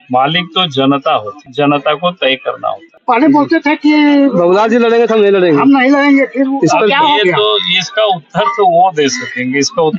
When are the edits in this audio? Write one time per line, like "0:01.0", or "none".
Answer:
0:01.4
0:02.9